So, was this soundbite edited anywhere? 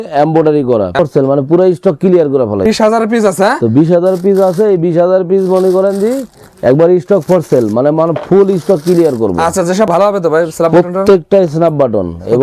yes; 3 cuts; at 1.0 s, 2.7 s, 9.9 s

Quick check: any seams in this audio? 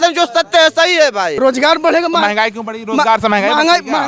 yes; 1 cut; at 1.3 s

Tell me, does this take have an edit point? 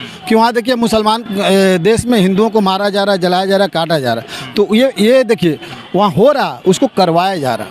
no; 0 cuts

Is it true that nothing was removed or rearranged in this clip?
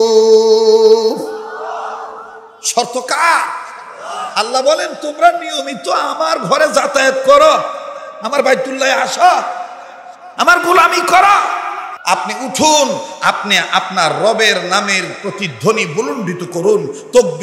no; 1 cut; at 11.9 s

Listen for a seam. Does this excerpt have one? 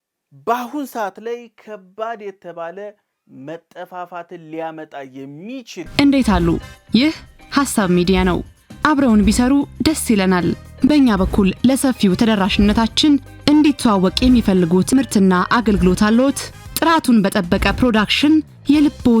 yes; 1 cut; at 5.9 s

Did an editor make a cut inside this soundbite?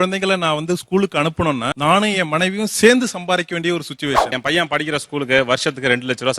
yes; 1 cut; at 4.4 s

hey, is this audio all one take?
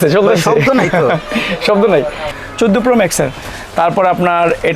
no; 1 cut; at 2.3 s

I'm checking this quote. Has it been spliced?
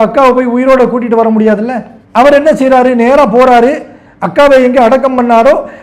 no; 0 cuts

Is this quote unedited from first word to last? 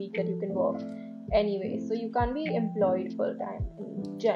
yes; 0 cuts

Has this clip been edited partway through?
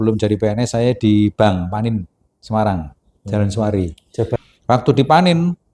yes; 1 cut; at 4.4 s

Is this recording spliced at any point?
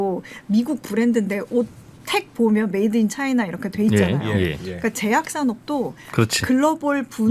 no; 0 cuts

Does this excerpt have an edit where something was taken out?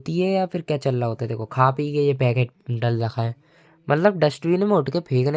no; 0 cuts

